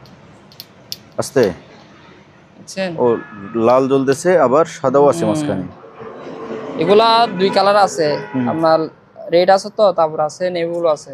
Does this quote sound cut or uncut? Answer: uncut